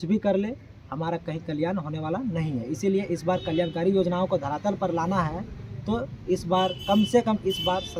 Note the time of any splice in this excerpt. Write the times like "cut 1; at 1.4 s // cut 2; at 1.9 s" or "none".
none